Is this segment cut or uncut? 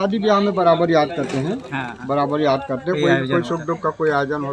uncut